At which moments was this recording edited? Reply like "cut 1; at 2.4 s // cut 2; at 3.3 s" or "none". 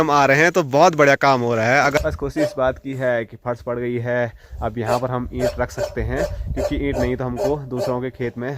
cut 1; at 2.0 s